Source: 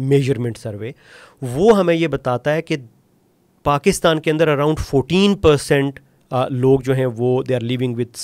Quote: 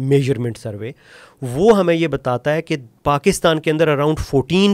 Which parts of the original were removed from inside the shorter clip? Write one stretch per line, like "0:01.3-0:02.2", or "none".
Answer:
0:02.8-0:03.4